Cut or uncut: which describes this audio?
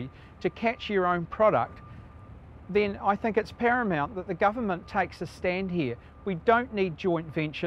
uncut